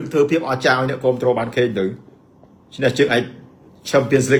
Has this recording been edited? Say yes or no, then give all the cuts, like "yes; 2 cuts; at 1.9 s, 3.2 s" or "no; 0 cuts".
no; 0 cuts